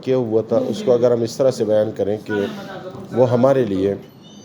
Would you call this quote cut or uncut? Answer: uncut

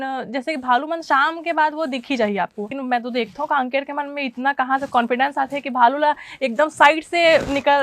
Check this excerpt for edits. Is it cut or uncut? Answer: cut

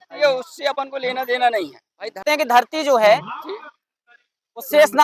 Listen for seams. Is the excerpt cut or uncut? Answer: cut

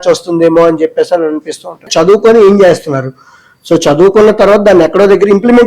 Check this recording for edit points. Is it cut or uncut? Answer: cut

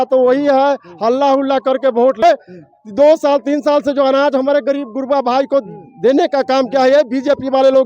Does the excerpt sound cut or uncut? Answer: cut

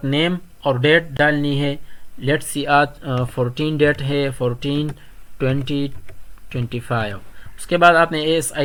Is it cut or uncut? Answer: uncut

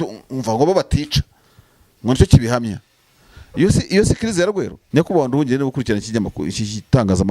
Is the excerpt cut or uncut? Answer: cut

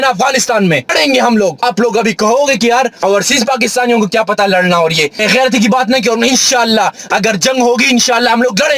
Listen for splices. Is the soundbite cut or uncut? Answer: cut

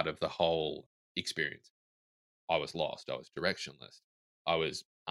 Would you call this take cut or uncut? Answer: cut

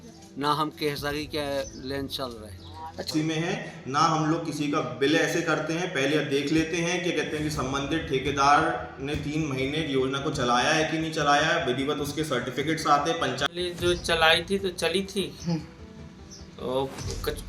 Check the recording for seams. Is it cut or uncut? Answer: cut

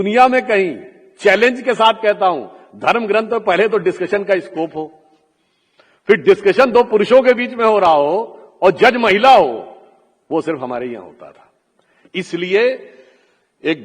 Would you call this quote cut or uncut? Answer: uncut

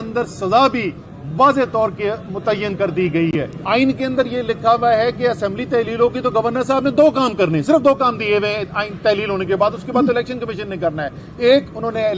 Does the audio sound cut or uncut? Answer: cut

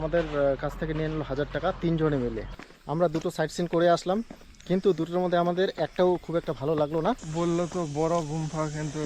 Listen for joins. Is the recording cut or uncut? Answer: cut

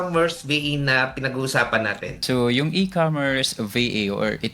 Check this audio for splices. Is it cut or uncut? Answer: cut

